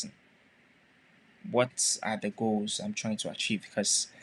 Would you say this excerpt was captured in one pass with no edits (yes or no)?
yes